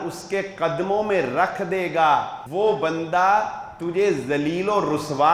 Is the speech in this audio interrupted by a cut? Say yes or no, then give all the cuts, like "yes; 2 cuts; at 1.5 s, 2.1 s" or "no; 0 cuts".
yes; 1 cut; at 2.4 s